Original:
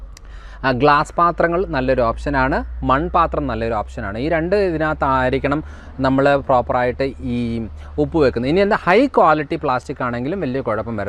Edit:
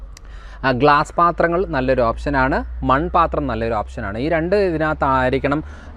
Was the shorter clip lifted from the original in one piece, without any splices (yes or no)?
yes